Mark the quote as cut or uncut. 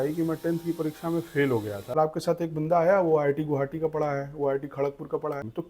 cut